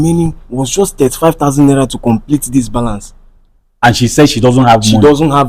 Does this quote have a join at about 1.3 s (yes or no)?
no